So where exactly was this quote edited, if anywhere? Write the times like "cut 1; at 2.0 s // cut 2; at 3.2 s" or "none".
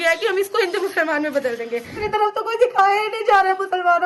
cut 1; at 2.0 s